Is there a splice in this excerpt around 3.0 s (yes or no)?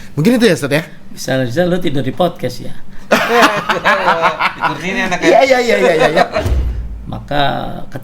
no